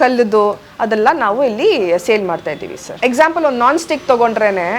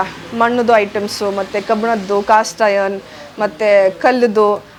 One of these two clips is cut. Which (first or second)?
first